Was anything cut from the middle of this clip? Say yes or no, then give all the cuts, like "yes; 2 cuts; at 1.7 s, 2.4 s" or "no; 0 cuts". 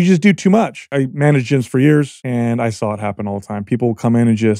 yes; 2 cuts; at 0.8 s, 2.2 s